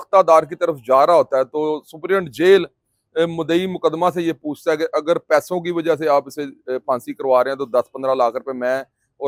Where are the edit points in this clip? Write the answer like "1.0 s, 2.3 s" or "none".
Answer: none

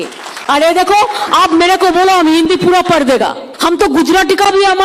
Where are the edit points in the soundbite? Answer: 3.5 s

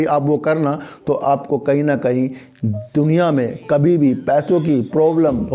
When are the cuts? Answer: none

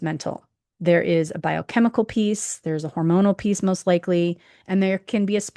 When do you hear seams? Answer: none

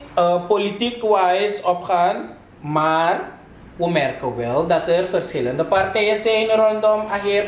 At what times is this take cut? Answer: none

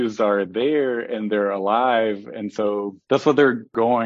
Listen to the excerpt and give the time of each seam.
3.0 s

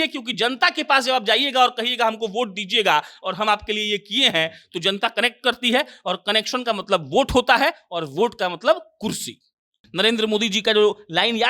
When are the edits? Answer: 9.8 s

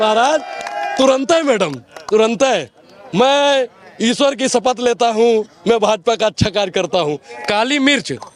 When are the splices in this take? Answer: 7.3 s

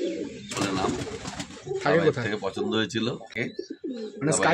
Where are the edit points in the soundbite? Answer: 3.4 s

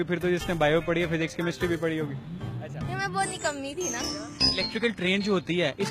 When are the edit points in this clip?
4.2 s

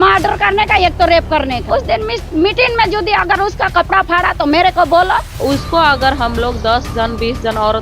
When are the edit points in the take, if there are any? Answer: 1.7 s, 5.3 s

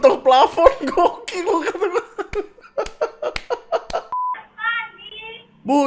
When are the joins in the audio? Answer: 4.1 s

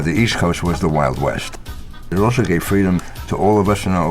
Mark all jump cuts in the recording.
1.6 s, 3.2 s

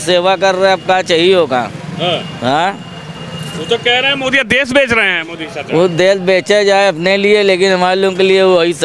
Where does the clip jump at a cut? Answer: none

